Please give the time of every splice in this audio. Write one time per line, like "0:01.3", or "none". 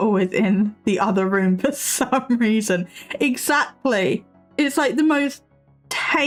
none